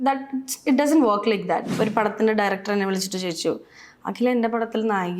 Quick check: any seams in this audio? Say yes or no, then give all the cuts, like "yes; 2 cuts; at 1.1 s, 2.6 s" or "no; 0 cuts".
yes; 1 cut; at 1.7 s